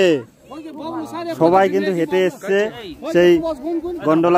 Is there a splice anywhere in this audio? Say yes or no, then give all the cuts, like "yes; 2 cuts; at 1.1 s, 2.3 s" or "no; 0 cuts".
no; 0 cuts